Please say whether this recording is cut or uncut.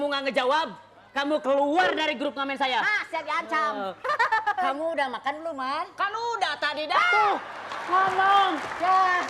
uncut